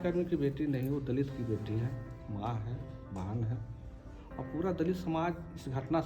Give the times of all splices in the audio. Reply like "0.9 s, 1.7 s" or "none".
none